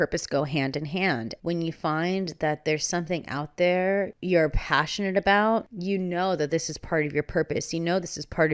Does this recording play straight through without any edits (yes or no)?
no